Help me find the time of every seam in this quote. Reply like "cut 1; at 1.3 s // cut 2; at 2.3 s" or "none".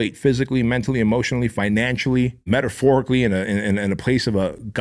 cut 1; at 2.4 s